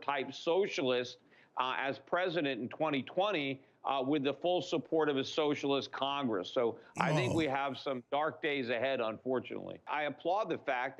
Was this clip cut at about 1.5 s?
no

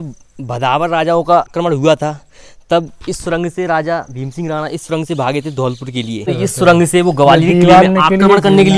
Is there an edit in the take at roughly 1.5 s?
yes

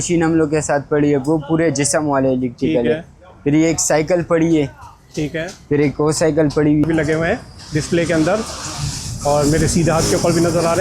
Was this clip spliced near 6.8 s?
yes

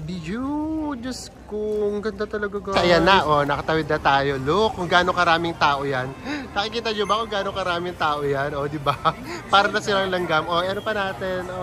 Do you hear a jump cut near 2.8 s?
yes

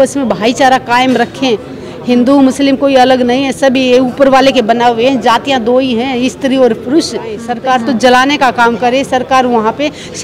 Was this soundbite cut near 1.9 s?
no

